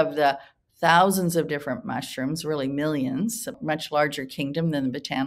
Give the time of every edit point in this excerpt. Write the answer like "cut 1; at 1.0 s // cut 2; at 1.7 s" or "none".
cut 1; at 3.6 s